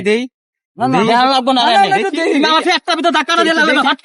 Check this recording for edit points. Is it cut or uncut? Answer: uncut